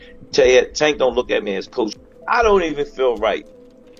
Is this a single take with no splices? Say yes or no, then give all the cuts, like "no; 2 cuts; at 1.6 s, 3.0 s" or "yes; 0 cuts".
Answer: no; 1 cut; at 2.0 s